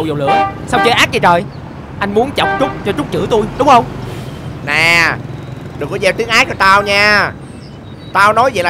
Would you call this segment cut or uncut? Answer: uncut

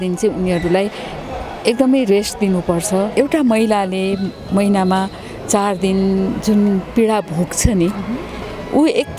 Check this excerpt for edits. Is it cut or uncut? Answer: cut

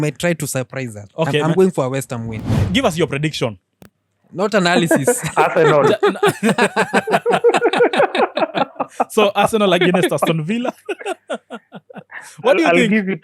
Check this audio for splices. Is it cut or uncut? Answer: cut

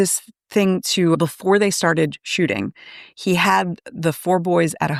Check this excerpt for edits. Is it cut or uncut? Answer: uncut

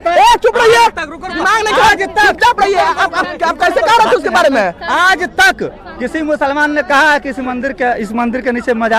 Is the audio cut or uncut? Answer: uncut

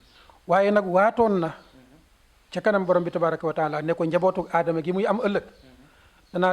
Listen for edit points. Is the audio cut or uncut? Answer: uncut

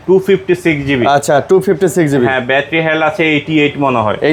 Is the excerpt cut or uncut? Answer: uncut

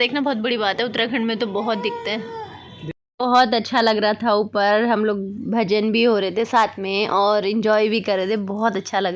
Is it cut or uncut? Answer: uncut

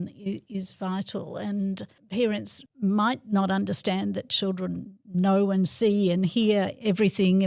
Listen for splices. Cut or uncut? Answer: cut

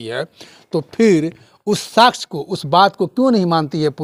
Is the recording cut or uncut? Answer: uncut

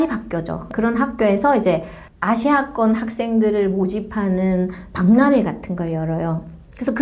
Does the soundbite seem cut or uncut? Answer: uncut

